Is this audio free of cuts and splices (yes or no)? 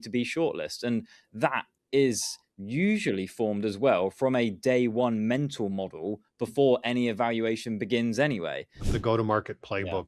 no